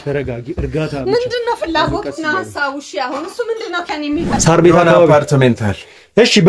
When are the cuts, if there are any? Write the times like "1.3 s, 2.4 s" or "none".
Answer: 4.3 s